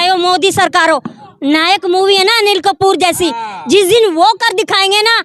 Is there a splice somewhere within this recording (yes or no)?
no